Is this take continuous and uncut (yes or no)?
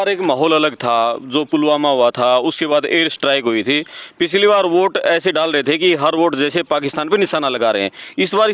yes